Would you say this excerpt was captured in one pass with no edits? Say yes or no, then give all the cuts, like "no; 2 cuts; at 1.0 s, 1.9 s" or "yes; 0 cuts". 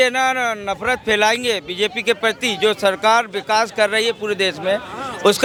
yes; 0 cuts